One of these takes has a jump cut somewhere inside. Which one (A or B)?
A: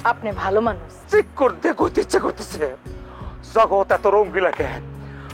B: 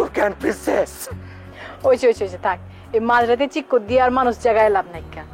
A